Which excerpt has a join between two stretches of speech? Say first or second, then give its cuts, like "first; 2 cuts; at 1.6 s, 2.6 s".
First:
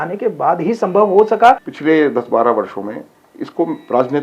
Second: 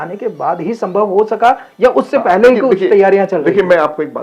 first; 1 cut; at 1.7 s